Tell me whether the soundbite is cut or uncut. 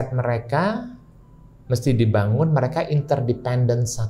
uncut